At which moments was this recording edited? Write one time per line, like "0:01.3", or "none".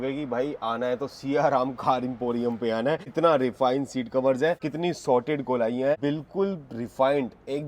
0:03.1
0:04.7
0:06.0